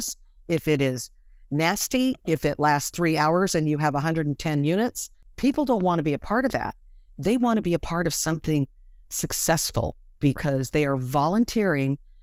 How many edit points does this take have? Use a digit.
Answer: 0